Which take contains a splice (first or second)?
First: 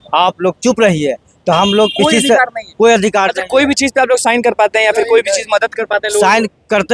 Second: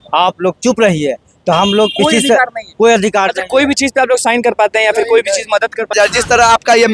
second